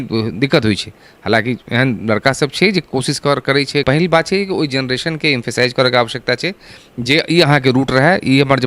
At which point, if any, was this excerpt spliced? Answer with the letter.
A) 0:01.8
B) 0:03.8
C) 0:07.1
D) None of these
B